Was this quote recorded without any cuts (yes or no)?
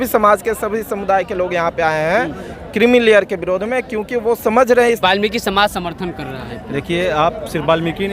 no